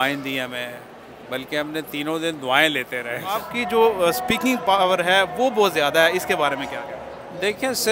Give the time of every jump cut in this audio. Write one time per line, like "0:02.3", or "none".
0:03.5